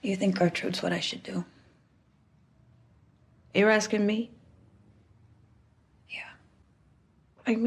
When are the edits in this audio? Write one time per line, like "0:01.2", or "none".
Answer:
0:06.7